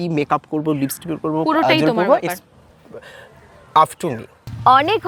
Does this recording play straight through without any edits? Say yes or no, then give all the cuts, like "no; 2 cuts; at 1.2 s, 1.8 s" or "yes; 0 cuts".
yes; 0 cuts